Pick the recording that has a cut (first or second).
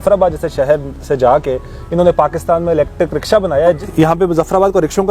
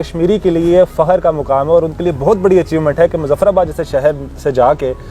first